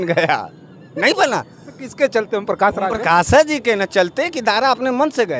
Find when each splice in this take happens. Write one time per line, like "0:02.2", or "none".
none